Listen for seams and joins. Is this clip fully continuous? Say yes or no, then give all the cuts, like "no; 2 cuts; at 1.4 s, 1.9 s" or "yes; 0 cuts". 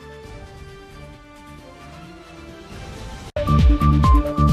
no; 1 cut; at 3.3 s